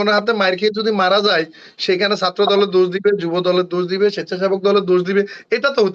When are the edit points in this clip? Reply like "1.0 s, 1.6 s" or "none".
none